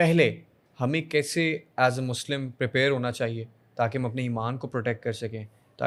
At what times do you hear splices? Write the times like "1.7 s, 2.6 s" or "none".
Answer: none